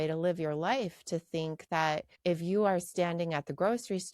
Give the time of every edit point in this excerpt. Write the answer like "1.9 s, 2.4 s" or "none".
2.1 s